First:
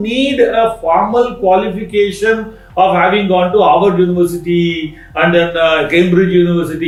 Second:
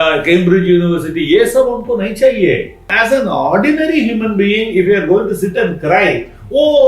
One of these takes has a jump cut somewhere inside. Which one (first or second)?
second